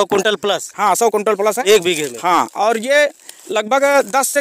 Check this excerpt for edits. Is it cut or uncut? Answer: uncut